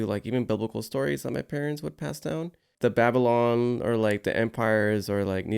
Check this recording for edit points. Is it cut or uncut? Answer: cut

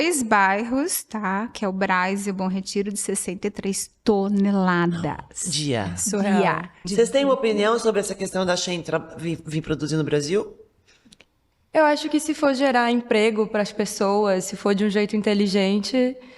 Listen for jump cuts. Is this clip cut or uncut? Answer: cut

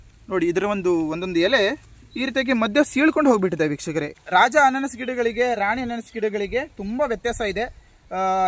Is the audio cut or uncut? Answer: cut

